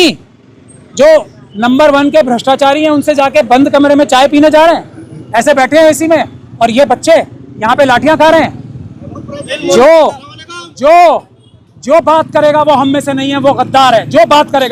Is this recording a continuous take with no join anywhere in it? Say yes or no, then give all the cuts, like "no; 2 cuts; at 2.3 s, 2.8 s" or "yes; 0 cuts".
yes; 0 cuts